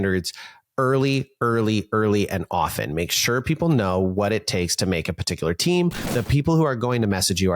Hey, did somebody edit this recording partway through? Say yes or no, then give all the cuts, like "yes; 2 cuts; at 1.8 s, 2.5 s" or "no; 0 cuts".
yes; 1 cut; at 6.0 s